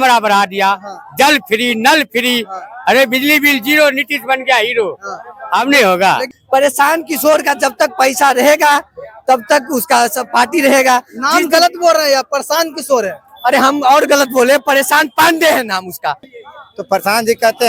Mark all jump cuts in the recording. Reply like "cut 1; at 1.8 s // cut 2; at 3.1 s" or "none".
cut 1; at 6.3 s // cut 2; at 16.3 s